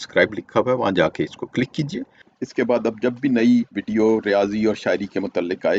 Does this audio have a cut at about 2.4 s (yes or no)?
no